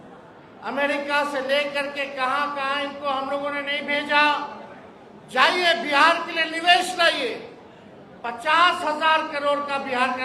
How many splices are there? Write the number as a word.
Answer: zero